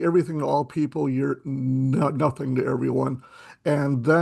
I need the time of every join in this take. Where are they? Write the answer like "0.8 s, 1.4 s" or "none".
none

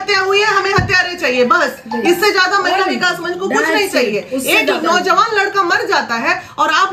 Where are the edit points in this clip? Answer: none

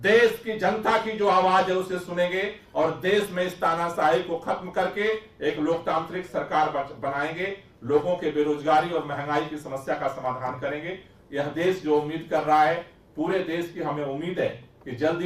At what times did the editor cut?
none

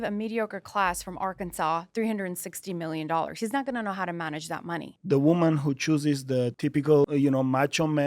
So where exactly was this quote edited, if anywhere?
4.9 s, 7.0 s

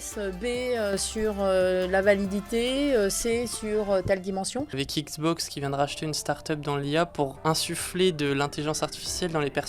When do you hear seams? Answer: 4.8 s, 7.4 s

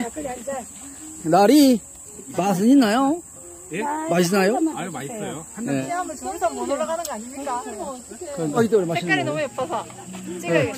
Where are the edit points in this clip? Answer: 5.9 s, 8.6 s

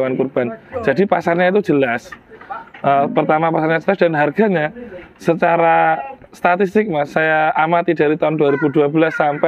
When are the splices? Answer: none

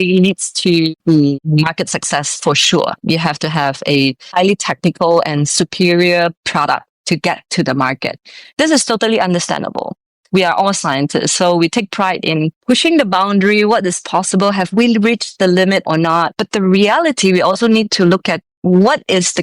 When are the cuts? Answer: 1.4 s

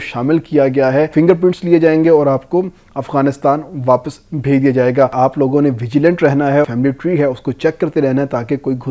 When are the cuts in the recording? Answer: 1.1 s, 5.1 s, 6.7 s

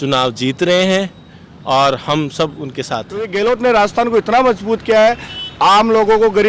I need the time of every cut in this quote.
3.3 s

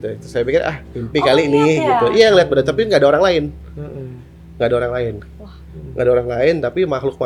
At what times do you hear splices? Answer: none

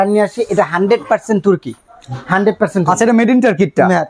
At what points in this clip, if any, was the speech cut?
none

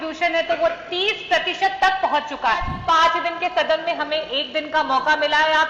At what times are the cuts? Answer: 2.7 s

